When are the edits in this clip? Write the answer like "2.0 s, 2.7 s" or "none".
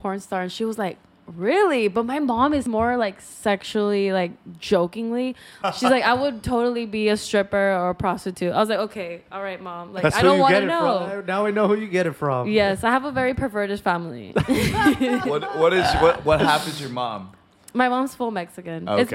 2.7 s, 5.5 s